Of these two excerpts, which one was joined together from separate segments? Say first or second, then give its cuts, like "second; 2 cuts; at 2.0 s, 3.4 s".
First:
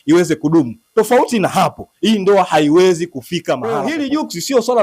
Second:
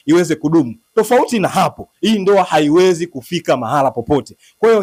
first; 1 cut; at 3.8 s